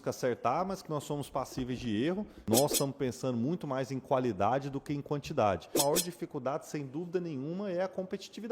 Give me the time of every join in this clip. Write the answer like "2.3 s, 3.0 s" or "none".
2.4 s, 5.8 s